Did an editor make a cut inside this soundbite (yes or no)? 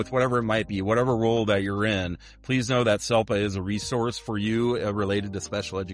no